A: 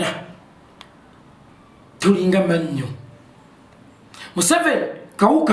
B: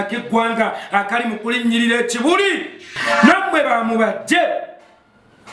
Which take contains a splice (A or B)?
B